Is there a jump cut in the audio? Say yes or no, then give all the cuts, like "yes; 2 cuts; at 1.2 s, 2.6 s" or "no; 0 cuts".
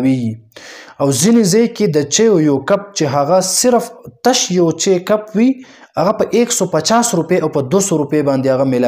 no; 0 cuts